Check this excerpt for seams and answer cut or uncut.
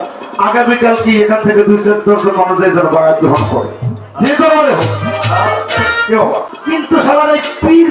uncut